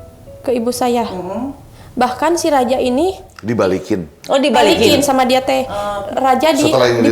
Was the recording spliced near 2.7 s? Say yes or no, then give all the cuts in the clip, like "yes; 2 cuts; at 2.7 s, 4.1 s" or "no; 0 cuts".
no; 1 cut; at 6.0 s